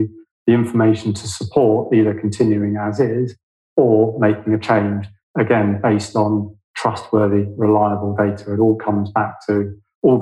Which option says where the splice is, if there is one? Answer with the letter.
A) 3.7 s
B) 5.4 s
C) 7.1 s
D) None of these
D